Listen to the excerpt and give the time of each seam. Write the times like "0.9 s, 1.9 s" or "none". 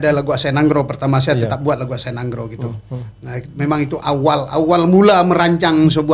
none